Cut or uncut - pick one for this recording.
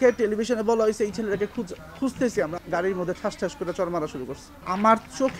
cut